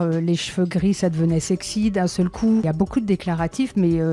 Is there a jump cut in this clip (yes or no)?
yes